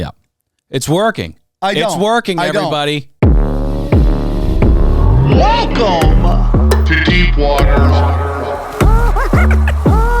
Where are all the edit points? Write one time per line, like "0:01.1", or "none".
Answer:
0:03.1